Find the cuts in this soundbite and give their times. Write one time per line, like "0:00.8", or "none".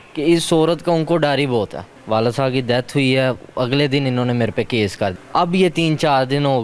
0:02.0
0:05.2